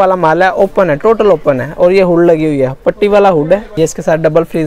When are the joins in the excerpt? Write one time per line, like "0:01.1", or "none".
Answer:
0:03.7